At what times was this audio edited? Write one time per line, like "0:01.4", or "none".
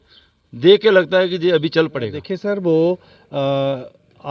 0:02.3